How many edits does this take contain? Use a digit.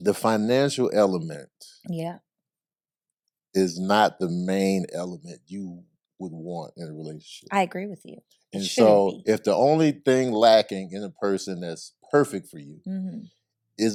0